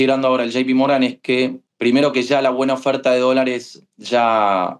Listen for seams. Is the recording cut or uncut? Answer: cut